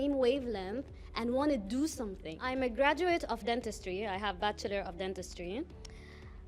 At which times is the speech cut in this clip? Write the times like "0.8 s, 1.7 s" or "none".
2.4 s